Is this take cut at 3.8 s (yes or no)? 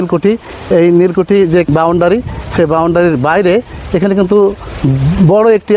no